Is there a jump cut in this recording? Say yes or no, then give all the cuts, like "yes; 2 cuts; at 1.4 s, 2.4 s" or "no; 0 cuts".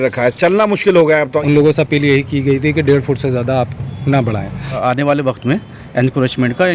yes; 2 cuts; at 1.4 s, 4.8 s